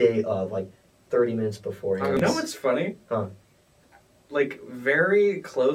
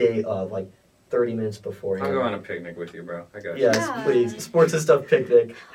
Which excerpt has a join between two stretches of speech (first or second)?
first